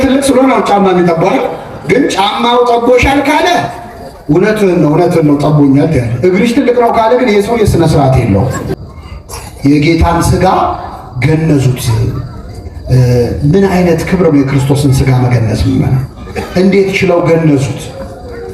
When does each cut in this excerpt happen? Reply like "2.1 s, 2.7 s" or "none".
8.7 s